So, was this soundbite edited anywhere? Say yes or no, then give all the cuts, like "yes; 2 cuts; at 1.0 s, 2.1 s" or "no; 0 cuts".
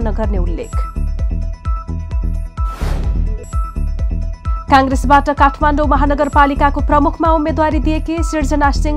no; 0 cuts